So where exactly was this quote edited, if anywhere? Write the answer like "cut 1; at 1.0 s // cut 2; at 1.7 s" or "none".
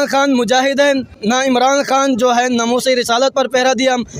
cut 1; at 1.1 s